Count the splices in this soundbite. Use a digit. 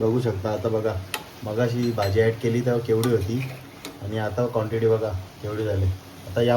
0